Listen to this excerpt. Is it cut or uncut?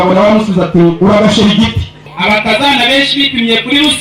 cut